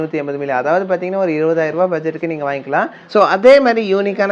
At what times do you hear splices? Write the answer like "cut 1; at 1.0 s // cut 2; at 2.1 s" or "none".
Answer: cut 1; at 3.0 s

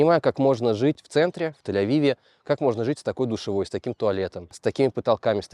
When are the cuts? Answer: cut 1; at 1.0 s

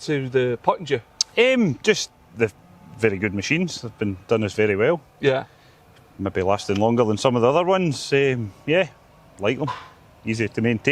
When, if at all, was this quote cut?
none

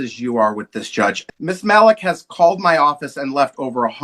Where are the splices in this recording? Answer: cut 1; at 1.2 s

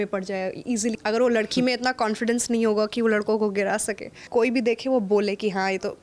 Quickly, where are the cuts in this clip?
cut 1; at 1.0 s // cut 2; at 4.2 s

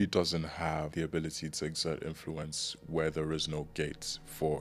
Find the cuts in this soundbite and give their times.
none

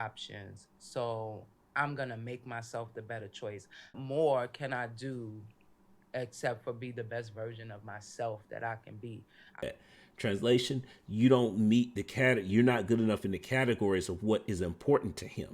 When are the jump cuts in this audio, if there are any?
cut 1; at 4.0 s // cut 2; at 9.6 s

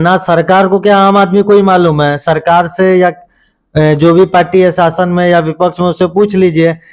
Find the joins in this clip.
none

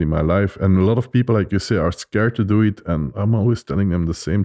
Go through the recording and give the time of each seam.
cut 1; at 3.2 s

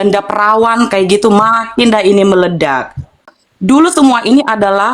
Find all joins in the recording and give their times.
cut 1; at 3.2 s

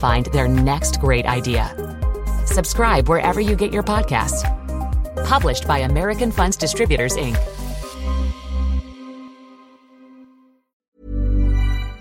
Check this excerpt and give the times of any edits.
cut 1; at 10.6 s

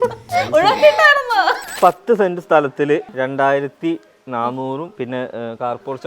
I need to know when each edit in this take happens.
cut 1; at 1.7 s // cut 2; at 3.1 s // cut 3; at 4.9 s

